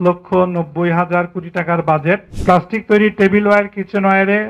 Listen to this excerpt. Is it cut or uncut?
cut